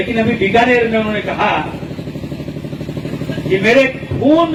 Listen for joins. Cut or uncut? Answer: uncut